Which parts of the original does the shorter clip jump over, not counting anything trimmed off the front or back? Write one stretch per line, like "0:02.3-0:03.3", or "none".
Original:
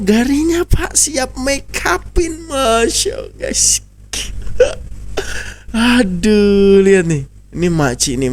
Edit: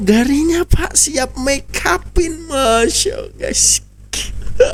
none